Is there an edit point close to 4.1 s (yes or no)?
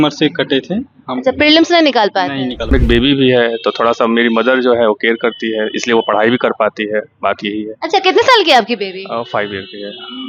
no